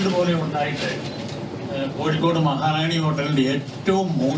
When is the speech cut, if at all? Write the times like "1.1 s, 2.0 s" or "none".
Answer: none